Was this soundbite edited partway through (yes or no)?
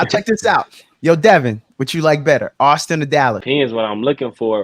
yes